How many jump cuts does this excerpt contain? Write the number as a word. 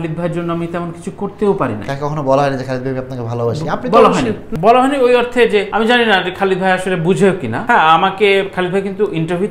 three